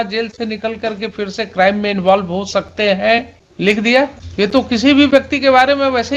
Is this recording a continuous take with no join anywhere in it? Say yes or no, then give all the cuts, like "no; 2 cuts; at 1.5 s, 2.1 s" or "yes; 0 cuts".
no; 2 cuts; at 3.4 s, 4.2 s